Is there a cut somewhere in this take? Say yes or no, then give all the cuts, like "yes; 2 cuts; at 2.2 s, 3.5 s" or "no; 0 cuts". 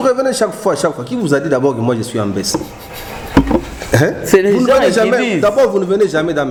no; 0 cuts